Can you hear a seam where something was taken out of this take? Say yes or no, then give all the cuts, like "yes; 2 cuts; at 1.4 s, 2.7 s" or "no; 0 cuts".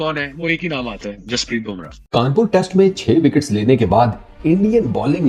yes; 1 cut; at 2.0 s